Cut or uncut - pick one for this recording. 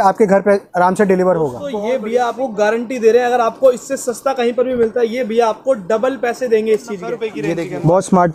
cut